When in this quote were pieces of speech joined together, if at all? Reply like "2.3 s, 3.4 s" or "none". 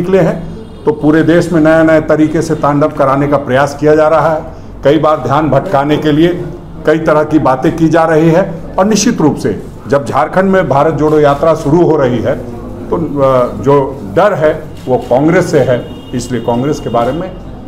none